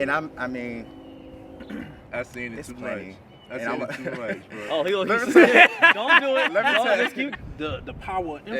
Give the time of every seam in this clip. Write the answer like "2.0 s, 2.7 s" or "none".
7.2 s